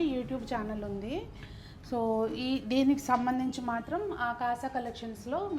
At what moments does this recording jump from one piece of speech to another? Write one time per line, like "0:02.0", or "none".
none